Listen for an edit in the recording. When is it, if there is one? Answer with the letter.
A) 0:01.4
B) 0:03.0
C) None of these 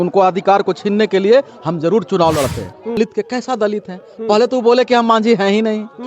B